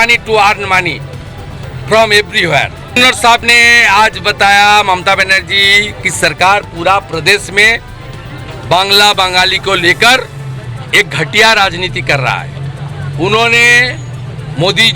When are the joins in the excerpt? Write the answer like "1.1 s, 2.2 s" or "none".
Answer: none